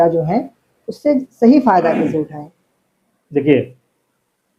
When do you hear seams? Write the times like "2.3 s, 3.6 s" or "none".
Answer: none